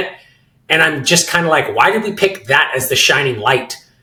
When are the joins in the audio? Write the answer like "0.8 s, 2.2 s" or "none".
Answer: none

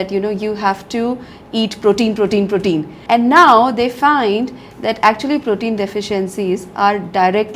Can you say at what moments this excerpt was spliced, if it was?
2.9 s

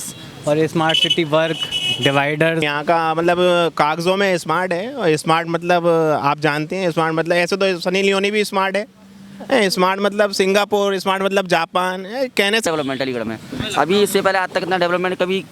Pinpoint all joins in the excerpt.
2.7 s, 12.6 s

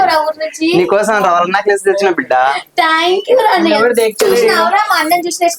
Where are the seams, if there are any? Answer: none

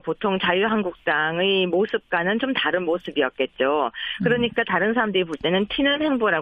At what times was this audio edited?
2.1 s

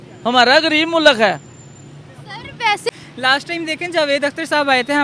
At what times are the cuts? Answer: 2.9 s

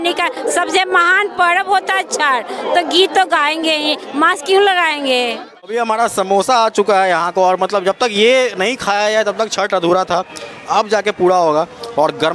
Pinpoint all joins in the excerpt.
5.7 s

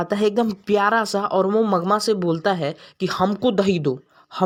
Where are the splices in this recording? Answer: none

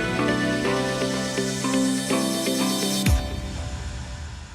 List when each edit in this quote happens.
2.0 s

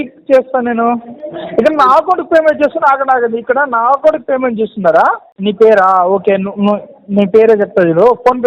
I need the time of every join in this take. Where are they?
5.3 s

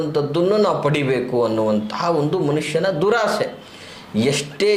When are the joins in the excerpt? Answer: none

